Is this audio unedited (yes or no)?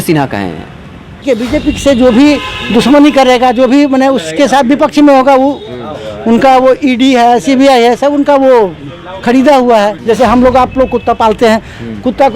no